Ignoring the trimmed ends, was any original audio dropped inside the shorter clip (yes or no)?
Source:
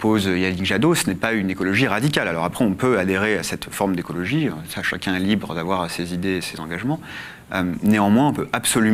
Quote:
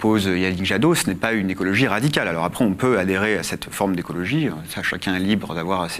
no